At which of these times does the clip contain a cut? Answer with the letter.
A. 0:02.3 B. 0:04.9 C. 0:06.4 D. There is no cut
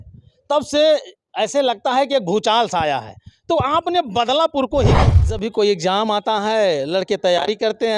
B